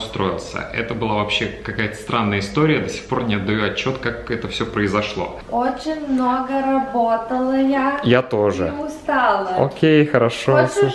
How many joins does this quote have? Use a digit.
1